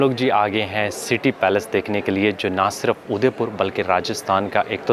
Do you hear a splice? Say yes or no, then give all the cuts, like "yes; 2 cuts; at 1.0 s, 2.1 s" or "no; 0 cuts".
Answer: no; 0 cuts